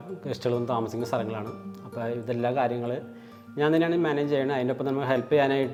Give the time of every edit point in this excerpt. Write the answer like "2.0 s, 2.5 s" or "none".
none